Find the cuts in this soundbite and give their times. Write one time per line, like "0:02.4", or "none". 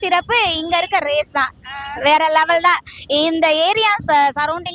none